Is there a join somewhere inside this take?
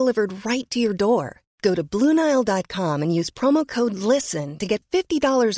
no; 0 cuts

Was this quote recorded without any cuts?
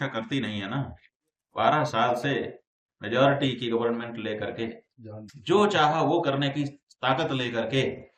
yes; 0 cuts

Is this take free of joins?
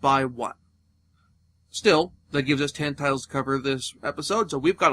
no; 1 cut; at 1.4 s

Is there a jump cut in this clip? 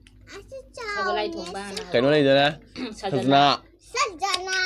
no; 0 cuts

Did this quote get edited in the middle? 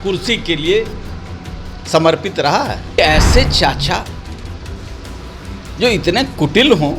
yes; 1 cut; at 3.0 s

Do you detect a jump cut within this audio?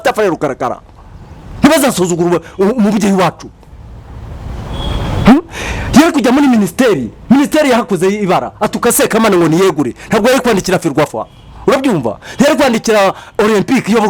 no; 0 cuts

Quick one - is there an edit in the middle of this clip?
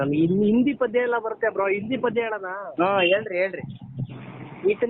no; 0 cuts

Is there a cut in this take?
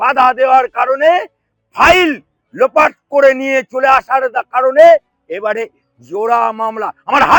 no; 0 cuts

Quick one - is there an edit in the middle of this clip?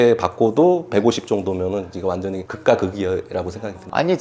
no; 0 cuts

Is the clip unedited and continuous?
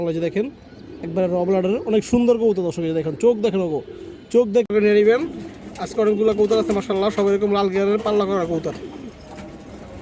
no; 1 cut; at 4.7 s

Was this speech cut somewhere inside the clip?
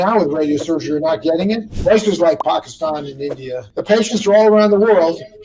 yes; 2 cuts; at 1.7 s, 3.7 s

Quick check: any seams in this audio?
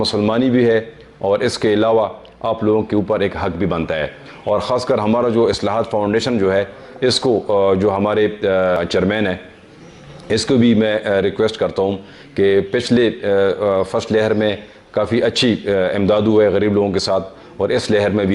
yes; 1 cut; at 8.8 s

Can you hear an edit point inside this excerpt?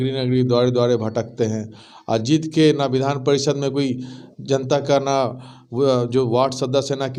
no; 0 cuts

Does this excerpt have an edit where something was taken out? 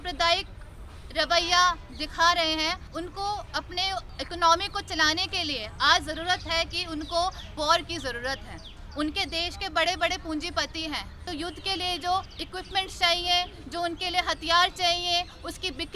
yes; 5 cuts; at 2.9 s, 4.2 s, 7.5 s, 11.2 s, 12.4 s

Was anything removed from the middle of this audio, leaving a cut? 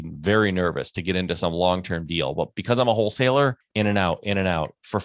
yes; 1 cut; at 3.6 s

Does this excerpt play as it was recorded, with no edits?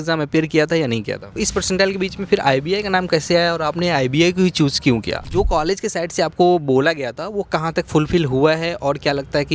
no; 2 cuts; at 1.4 s, 5.2 s

